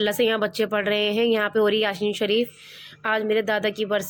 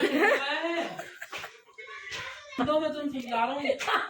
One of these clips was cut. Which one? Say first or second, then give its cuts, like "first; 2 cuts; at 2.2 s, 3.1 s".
second; 1 cut; at 2.6 s